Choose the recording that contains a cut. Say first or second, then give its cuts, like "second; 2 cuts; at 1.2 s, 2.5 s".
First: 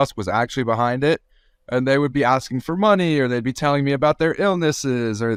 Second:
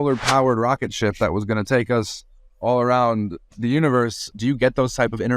second; 1 cut; at 4.3 s